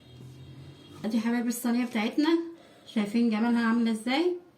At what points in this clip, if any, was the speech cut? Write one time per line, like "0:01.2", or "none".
0:01.0